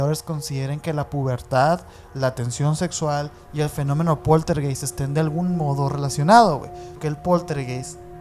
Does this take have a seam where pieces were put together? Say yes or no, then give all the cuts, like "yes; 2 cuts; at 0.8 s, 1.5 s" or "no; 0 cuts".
yes; 1 cut; at 6.9 s